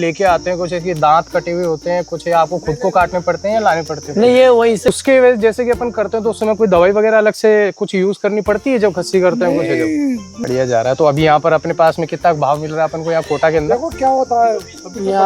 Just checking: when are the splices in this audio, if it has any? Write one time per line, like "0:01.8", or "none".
0:04.9
0:10.3